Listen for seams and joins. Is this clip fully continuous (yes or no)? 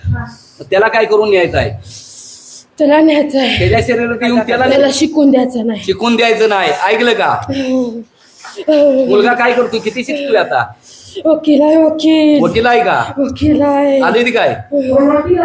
no